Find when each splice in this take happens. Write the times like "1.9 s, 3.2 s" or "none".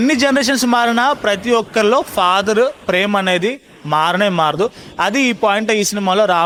none

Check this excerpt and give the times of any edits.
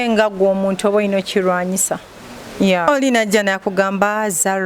2.8 s

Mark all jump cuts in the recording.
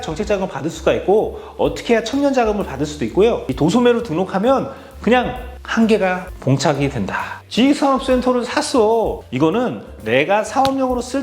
7.4 s

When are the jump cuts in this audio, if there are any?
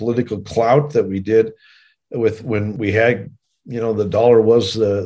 2.7 s

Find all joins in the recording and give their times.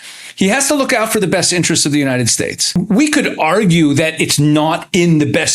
2.8 s

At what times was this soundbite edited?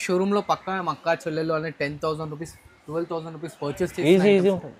none

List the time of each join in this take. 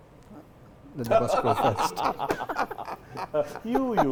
none

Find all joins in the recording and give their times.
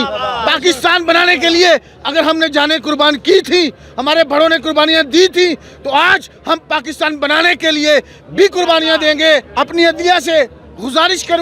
9.5 s

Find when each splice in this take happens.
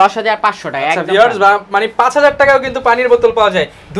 none

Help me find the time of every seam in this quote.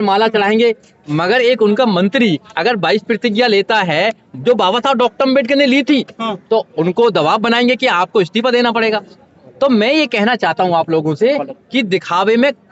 none

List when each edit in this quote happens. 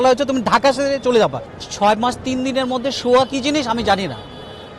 1.5 s

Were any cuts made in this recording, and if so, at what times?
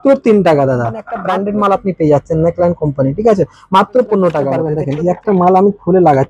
1.1 s, 4.8 s

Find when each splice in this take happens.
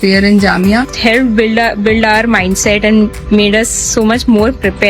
0.9 s

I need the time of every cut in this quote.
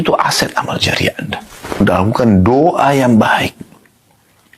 1.8 s

